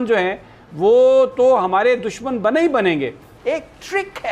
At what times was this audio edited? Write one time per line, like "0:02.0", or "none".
0:03.3